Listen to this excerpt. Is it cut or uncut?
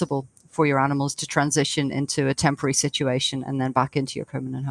uncut